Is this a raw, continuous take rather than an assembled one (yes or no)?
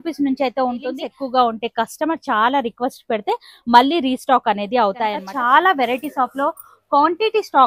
no